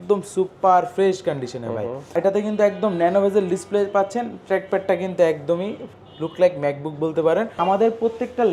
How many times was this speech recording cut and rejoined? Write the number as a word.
two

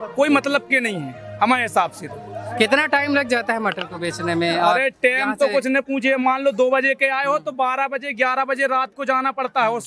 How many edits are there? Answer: zero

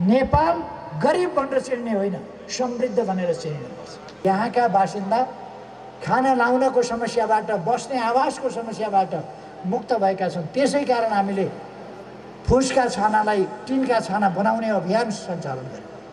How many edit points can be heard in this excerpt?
one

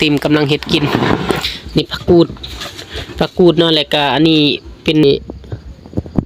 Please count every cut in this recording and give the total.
one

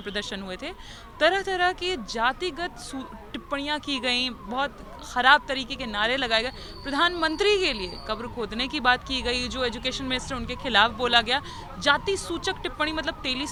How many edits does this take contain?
zero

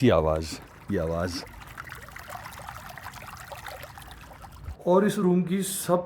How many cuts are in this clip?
two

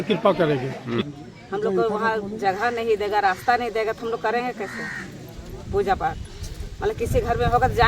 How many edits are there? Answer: one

